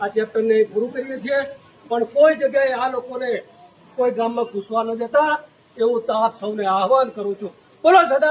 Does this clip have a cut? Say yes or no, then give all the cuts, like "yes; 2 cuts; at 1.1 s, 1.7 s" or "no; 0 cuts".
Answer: no; 0 cuts